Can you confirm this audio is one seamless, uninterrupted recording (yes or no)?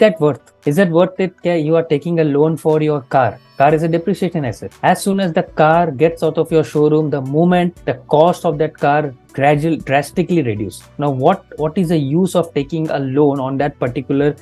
yes